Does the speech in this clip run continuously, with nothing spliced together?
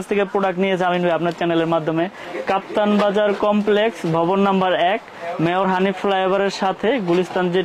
no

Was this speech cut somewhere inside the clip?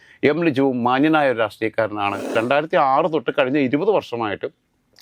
yes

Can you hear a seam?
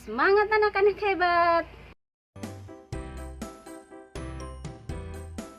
yes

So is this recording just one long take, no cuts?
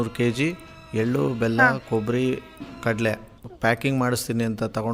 no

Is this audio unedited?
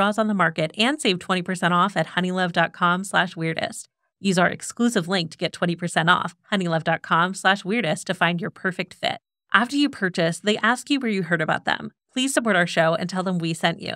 yes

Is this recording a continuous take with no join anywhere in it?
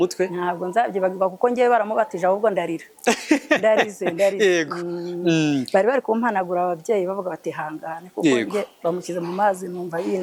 yes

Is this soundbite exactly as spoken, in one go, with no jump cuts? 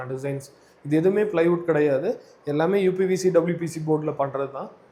yes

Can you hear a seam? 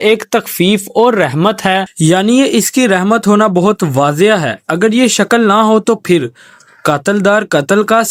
no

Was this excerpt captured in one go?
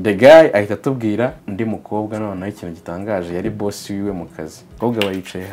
no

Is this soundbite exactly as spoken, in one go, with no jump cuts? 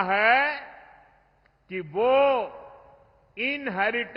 yes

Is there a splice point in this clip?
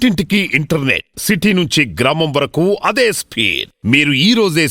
no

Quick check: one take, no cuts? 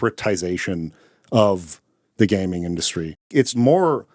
no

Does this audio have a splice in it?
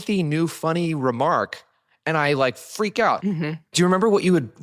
yes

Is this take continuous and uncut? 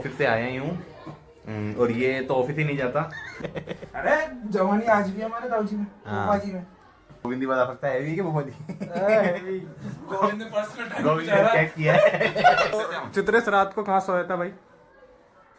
no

